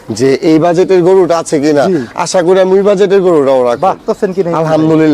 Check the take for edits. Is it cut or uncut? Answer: cut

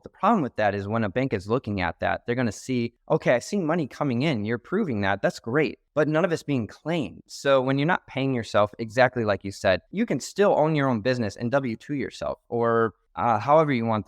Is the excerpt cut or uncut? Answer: cut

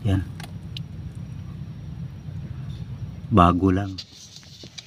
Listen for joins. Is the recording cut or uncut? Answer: uncut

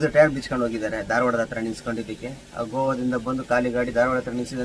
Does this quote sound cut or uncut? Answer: uncut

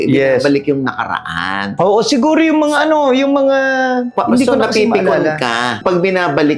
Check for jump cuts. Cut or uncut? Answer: uncut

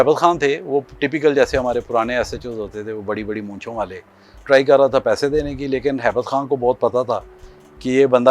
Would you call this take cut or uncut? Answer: cut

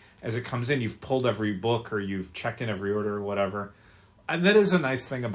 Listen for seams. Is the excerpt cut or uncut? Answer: uncut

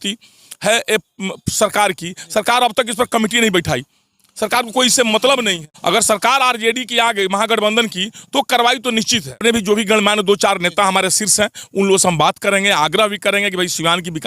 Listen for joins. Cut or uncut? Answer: cut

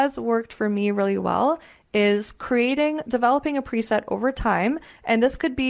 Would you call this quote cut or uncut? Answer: uncut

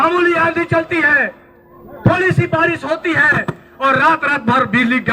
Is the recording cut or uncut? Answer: uncut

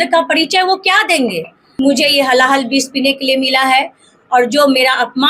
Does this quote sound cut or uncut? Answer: cut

